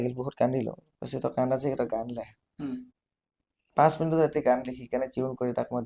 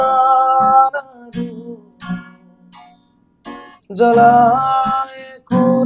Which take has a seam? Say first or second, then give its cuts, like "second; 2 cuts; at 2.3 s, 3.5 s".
first; 1 cut; at 2.9 s